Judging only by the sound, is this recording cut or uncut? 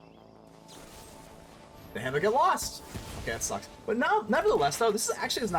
uncut